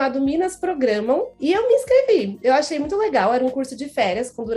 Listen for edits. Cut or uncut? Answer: cut